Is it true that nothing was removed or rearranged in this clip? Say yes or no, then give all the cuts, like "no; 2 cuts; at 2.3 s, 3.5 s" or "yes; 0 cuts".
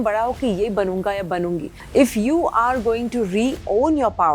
no; 1 cut; at 1.8 s